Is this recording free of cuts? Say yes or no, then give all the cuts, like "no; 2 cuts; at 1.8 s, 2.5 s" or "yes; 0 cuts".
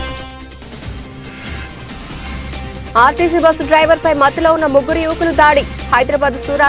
no; 1 cut; at 2.9 s